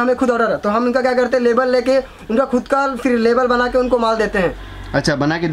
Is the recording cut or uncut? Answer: uncut